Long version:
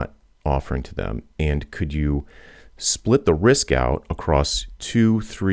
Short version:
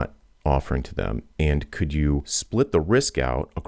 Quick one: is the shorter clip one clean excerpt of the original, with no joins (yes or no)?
no